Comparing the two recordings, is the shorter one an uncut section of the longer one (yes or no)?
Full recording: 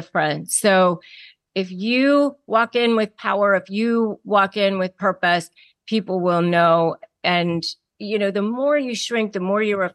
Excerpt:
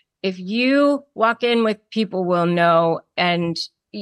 no